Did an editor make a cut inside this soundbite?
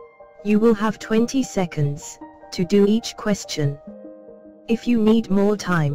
no; 0 cuts

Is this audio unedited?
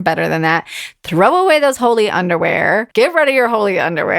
no; 1 cut; at 2.9 s

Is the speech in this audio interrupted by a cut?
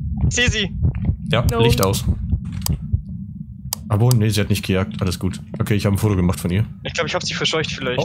no; 0 cuts

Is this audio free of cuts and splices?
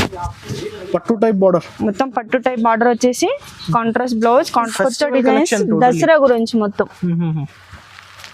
no; 1 cut; at 4.7 s

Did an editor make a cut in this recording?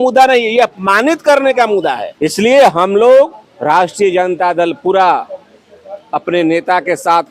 yes; 2 cuts; at 2.1 s, 3.5 s

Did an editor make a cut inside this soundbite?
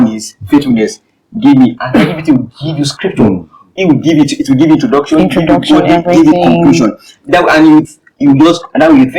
no; 0 cuts

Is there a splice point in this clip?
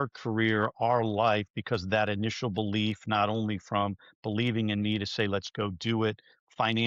no; 0 cuts

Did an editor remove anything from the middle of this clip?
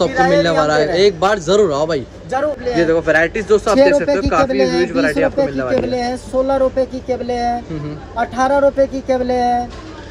yes; 1 cut; at 2.6 s

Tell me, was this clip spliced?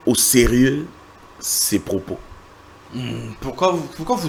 no; 0 cuts

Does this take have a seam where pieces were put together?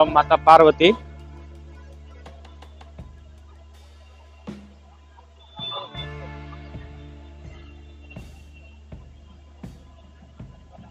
no; 0 cuts

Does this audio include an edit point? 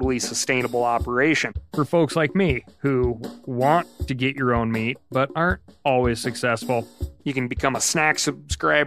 yes; 2 cuts; at 1.6 s, 7.1 s

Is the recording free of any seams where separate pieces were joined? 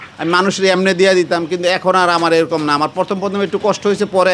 yes; 0 cuts

